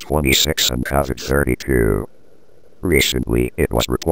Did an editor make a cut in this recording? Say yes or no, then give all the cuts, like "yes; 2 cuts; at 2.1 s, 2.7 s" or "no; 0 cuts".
no; 0 cuts